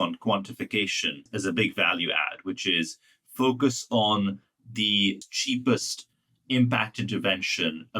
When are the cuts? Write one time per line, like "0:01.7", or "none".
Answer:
0:01.3
0:05.2